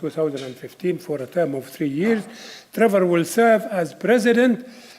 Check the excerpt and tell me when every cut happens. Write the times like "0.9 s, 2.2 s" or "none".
1.2 s